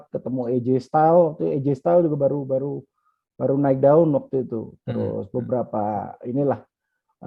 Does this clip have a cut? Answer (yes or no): no